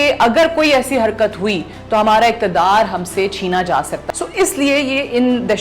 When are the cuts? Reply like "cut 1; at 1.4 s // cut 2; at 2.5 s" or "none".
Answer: cut 1; at 4.0 s